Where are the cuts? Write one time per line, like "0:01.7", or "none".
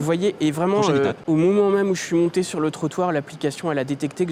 0:01.2